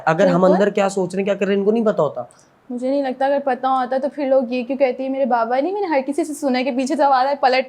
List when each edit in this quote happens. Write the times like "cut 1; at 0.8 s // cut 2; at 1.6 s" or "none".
none